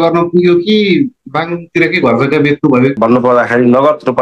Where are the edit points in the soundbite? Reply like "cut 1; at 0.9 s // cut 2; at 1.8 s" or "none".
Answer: cut 1; at 3.0 s